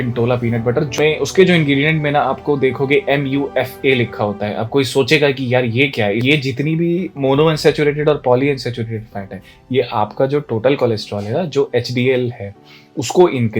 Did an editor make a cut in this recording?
yes; 2 cuts; at 0.9 s, 6.2 s

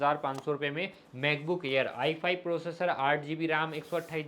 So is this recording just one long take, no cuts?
yes; 0 cuts

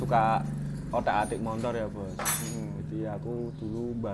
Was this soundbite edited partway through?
no; 0 cuts

